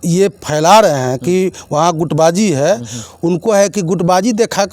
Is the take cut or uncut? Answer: uncut